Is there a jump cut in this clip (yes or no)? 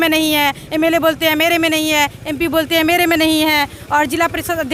no